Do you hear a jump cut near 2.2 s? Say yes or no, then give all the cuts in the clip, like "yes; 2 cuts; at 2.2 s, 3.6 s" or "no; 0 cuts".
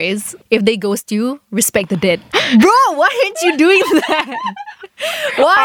yes; 1 cut; at 2.2 s